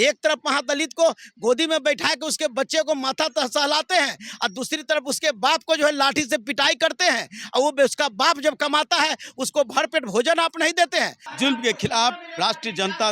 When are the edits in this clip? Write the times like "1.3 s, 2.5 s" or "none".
11.2 s